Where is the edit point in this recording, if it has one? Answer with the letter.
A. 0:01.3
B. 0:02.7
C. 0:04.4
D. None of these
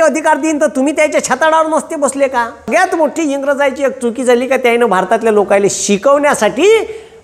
B